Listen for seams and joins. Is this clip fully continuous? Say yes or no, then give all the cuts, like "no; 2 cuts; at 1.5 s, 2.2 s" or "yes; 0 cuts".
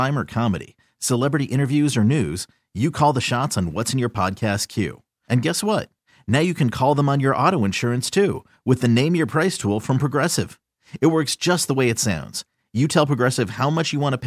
yes; 0 cuts